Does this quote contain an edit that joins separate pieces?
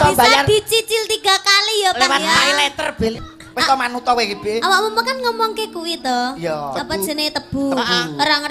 yes; 1 cut; at 3.1 s

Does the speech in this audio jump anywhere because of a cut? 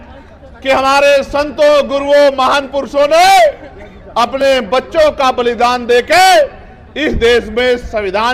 no; 0 cuts

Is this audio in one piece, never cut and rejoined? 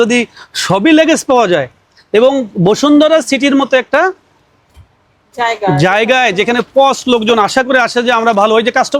yes; 0 cuts

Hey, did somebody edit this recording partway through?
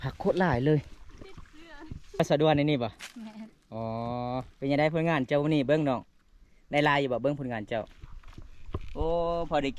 yes; 1 cut; at 2.2 s

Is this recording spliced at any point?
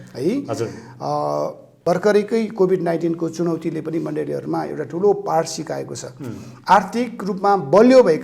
yes; 1 cut; at 1.7 s

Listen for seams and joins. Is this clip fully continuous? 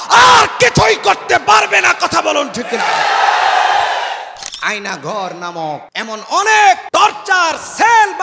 no; 3 cuts; at 4.4 s, 5.9 s, 6.8 s

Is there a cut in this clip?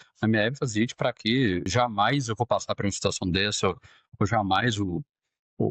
yes; 1 cut; at 1.7 s

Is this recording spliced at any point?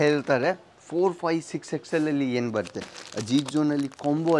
no; 0 cuts

